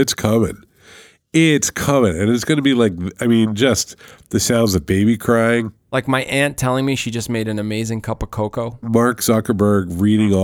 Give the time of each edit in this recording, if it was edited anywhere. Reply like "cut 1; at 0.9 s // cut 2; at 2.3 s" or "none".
cut 1; at 5.8 s